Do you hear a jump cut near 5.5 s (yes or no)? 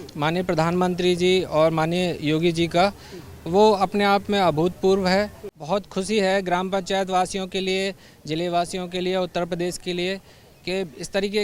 yes